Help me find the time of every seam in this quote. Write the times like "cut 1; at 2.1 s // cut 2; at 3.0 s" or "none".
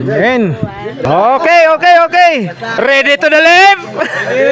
cut 1; at 1.0 s